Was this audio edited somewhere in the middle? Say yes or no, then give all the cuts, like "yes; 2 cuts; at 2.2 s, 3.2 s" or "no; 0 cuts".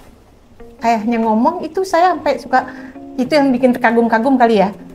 no; 0 cuts